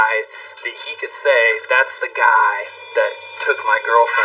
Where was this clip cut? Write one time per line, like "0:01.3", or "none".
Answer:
0:02.7